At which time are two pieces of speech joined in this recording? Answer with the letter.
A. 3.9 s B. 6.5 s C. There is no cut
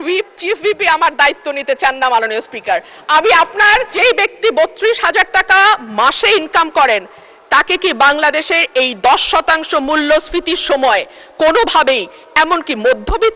A